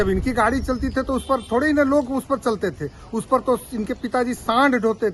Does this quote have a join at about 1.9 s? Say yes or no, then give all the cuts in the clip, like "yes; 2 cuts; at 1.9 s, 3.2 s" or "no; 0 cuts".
no; 0 cuts